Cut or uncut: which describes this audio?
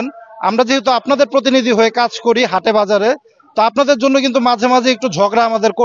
uncut